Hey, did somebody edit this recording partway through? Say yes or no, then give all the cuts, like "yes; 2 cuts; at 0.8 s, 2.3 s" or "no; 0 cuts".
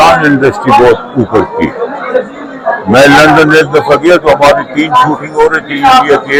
no; 0 cuts